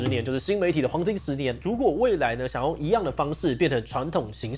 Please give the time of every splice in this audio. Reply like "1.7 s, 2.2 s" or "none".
1.6 s